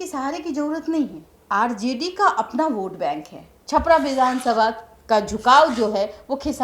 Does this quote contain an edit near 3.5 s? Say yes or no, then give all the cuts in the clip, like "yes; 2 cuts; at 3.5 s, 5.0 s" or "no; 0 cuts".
yes; 2 cuts; at 1.3 s, 3.5 s